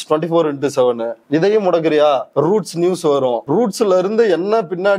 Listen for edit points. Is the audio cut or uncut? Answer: cut